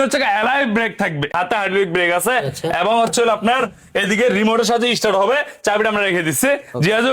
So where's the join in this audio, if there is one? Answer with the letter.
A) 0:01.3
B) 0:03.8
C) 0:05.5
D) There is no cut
A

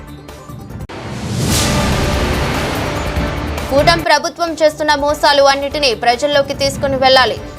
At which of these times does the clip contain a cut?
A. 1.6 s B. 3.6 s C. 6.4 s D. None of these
B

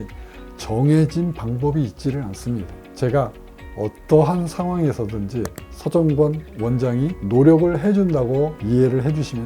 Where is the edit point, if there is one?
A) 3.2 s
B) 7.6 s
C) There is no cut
A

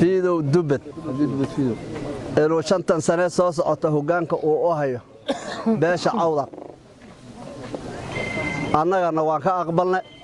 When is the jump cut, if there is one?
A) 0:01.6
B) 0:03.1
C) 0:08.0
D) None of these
C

